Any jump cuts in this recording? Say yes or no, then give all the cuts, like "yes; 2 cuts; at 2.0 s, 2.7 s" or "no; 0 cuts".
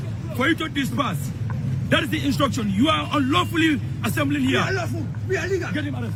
no; 0 cuts